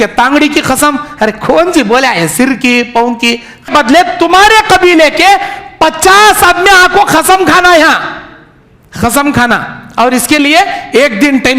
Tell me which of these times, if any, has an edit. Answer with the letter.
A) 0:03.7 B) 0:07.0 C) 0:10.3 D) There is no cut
A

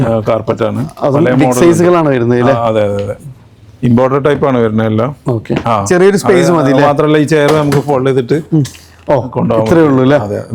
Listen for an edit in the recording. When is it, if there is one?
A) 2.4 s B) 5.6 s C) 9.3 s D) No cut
B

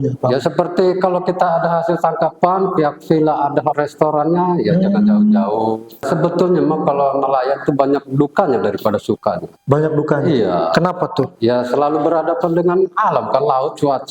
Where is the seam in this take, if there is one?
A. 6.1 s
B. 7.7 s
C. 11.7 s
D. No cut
A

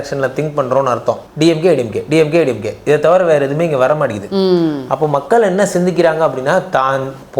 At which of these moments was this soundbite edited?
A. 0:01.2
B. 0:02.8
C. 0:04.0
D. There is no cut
A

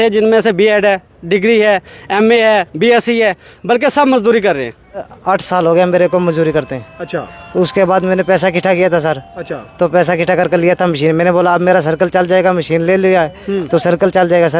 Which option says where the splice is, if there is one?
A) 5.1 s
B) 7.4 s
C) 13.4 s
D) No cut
A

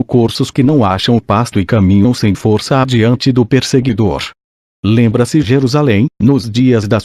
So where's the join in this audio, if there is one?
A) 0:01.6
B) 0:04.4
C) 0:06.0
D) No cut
A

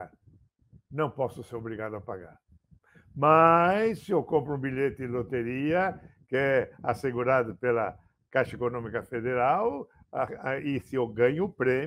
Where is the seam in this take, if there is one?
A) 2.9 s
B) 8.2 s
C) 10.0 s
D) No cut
D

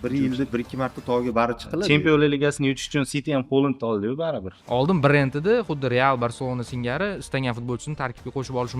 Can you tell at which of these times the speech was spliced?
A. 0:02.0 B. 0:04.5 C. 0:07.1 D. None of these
B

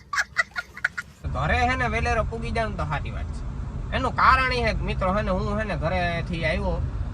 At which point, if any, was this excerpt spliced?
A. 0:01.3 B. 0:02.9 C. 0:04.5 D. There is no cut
A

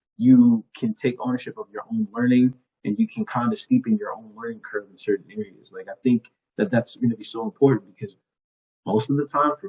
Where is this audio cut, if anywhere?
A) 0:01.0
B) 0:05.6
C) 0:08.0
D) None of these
D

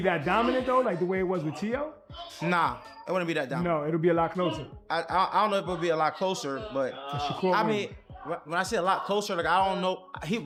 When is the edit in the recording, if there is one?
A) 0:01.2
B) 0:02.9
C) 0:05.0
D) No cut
D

